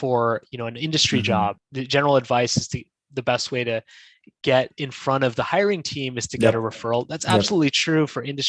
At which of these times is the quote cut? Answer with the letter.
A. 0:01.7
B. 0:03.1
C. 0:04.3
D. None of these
A